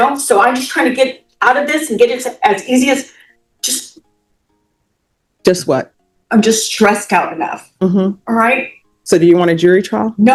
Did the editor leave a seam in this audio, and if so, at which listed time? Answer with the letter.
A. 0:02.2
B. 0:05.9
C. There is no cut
C